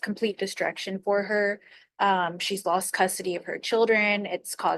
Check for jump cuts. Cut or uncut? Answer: uncut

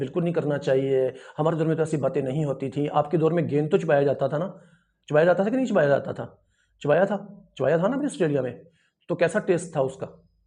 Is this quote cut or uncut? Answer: uncut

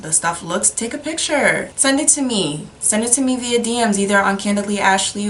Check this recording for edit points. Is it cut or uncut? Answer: uncut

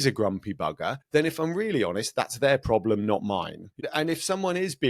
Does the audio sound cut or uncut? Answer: cut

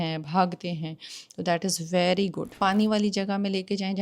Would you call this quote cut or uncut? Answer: cut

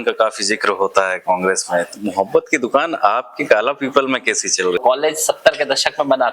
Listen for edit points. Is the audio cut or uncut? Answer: cut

